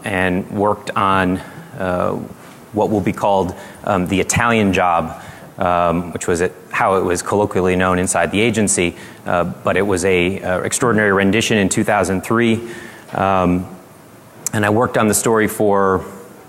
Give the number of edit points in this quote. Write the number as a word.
one